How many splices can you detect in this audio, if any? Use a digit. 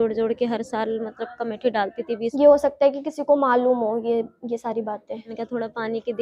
2